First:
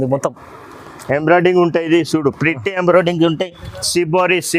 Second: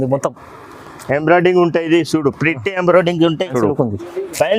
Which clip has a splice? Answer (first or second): second